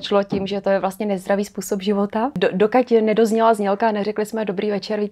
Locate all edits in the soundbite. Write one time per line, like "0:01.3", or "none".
0:02.4